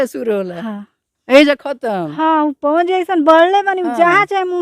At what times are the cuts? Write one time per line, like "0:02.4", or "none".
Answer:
none